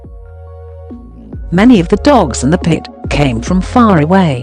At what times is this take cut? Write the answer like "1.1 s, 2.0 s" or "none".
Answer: 1.4 s